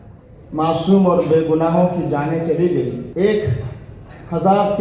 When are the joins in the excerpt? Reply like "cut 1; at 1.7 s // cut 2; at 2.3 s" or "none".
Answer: cut 1; at 3.1 s